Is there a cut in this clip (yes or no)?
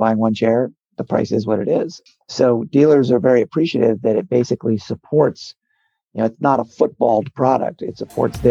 yes